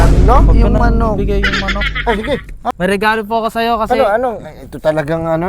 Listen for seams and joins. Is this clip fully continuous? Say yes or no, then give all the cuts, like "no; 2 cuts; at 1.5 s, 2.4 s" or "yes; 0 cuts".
no; 1 cut; at 2.6 s